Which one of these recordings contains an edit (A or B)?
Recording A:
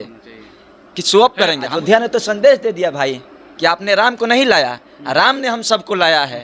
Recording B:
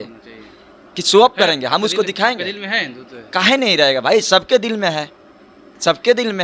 A